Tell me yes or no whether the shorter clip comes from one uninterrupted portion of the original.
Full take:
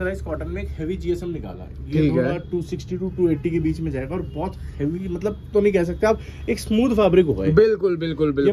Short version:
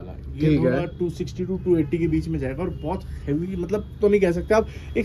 yes